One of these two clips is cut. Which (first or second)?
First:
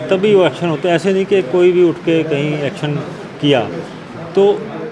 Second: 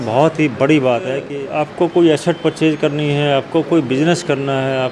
second